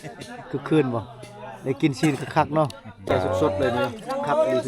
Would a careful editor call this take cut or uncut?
cut